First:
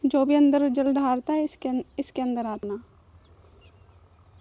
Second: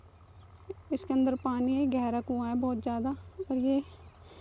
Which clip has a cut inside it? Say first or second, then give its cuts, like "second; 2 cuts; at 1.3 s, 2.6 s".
first; 1 cut; at 2.6 s